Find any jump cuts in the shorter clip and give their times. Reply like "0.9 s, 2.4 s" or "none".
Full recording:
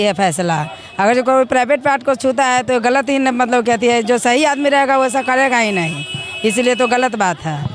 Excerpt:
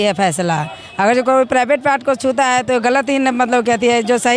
none